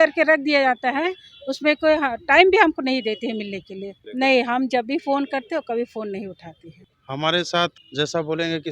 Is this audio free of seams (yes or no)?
no